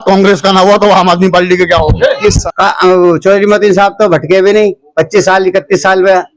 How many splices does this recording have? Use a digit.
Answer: 1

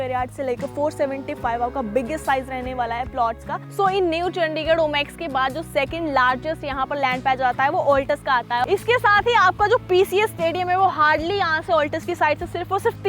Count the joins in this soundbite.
2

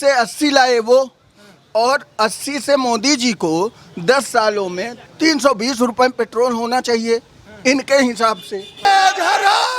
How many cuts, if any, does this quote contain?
2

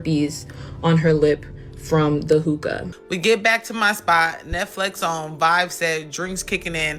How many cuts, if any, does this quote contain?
1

